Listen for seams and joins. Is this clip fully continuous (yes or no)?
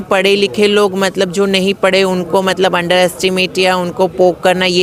yes